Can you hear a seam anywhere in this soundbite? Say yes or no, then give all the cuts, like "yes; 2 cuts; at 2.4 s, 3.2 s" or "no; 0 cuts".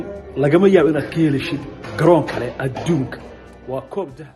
no; 0 cuts